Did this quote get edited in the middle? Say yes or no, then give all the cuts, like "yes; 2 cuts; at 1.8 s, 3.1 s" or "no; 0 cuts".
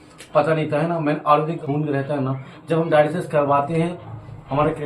yes; 1 cut; at 1.6 s